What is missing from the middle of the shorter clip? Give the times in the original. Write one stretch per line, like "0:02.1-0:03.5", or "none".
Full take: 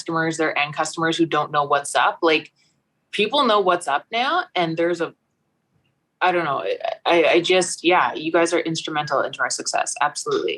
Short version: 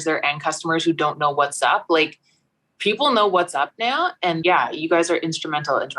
0:04.8-0:07.9

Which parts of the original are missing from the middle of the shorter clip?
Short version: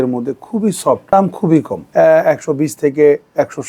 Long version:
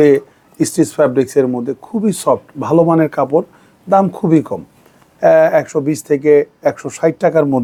0:02.4-0:03.8
0:04.6-0:05.1

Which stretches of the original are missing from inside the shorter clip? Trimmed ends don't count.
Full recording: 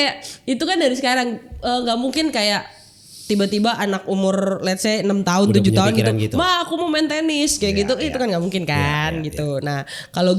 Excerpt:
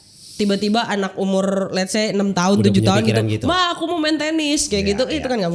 none

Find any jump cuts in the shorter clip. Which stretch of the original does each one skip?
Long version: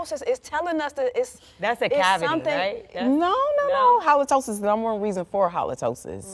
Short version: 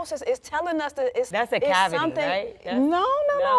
0:01.3-0:01.6

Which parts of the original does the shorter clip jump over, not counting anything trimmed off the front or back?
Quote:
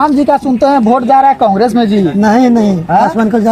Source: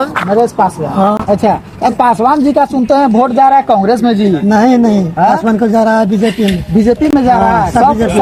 none

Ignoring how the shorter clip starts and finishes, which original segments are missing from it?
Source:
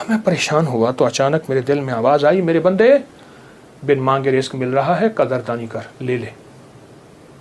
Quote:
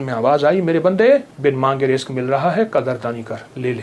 0:03.1-0:03.8

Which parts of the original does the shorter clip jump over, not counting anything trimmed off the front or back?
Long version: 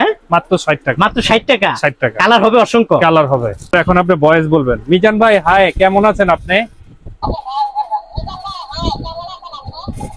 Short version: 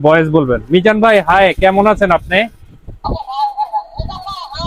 none

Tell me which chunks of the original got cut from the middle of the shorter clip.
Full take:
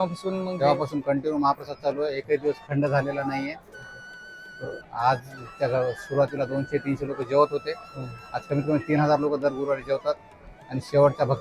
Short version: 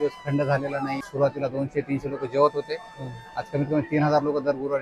0:03.5-0:06.0

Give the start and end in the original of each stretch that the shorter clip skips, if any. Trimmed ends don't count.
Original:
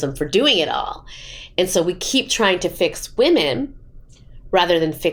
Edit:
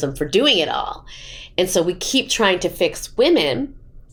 none

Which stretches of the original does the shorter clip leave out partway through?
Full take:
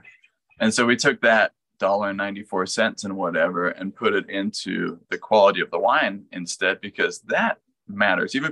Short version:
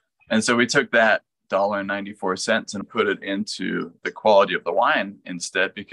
0:03.1-0:03.8

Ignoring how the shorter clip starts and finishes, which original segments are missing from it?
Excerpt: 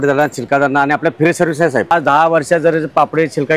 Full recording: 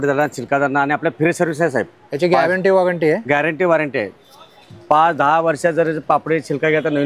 0:01.9-0:05.0

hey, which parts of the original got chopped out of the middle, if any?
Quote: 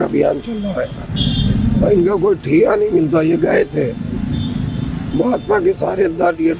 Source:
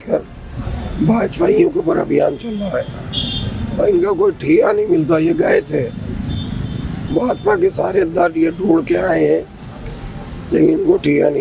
none

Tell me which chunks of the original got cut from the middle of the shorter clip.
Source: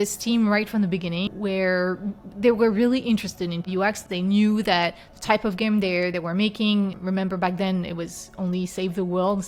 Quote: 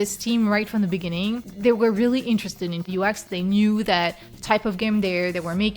0:01.3-0:02.1

